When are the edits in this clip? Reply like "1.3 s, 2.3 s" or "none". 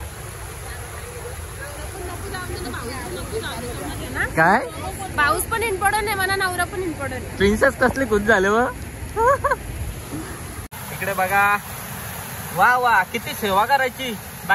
10.6 s